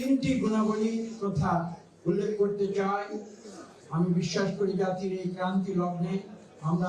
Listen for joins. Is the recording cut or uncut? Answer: uncut